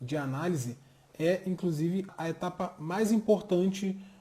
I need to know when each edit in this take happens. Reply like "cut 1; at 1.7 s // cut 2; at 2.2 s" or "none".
cut 1; at 2.1 s